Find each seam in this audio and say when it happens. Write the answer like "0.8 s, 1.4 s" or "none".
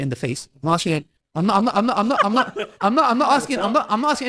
1.2 s